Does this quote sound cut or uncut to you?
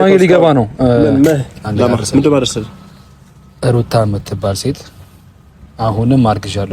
cut